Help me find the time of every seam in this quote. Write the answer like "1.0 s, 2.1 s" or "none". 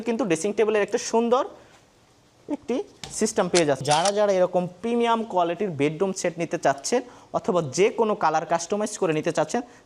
3.8 s

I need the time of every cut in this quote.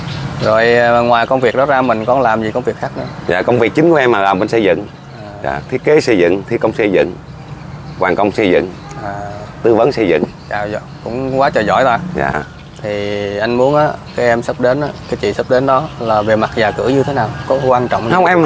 12.5 s

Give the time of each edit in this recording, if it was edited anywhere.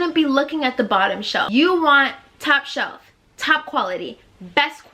1.5 s

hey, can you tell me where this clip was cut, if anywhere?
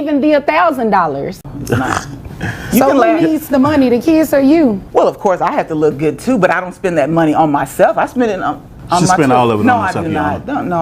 1.5 s, 4.8 s

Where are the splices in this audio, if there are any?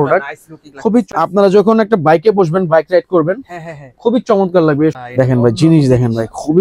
1.1 s, 5.0 s

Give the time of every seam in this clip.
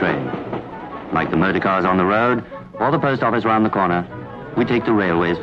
1.1 s

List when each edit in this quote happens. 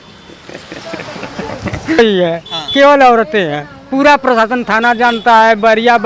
2.0 s

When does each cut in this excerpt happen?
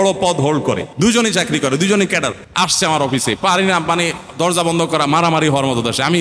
0.9 s, 2.4 s

